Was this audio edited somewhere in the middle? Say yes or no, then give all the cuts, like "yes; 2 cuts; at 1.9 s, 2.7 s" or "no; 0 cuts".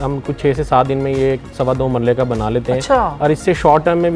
no; 0 cuts